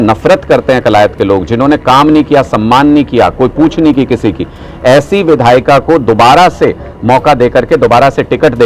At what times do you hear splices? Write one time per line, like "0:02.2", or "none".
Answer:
none